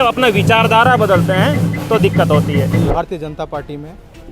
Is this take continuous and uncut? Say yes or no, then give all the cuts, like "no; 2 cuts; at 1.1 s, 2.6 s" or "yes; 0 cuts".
no; 1 cut; at 2.9 s